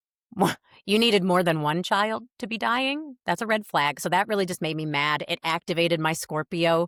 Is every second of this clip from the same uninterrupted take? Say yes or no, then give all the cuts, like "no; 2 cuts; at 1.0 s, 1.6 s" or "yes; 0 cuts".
yes; 0 cuts